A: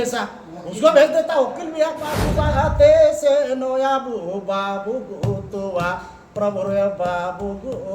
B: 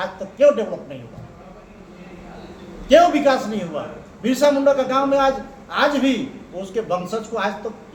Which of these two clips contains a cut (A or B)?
A